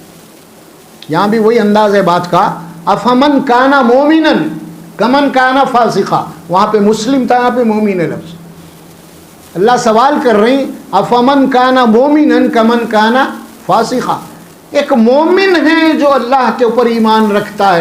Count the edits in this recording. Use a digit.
0